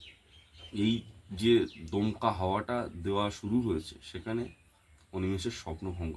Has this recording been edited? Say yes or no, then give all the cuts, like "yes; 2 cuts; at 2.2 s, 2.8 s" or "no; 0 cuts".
no; 0 cuts